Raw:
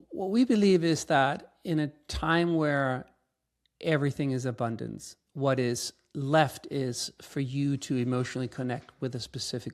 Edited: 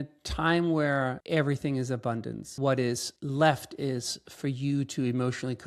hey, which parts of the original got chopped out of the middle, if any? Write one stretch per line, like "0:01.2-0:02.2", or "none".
0:03.0-0:03.7
0:05.0-0:05.2
0:05.9-0:06.1